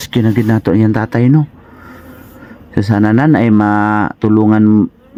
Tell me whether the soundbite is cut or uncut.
uncut